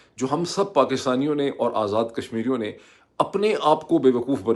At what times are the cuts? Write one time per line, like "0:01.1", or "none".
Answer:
none